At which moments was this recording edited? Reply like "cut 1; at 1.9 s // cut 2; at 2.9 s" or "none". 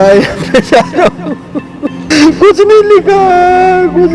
cut 1; at 2.1 s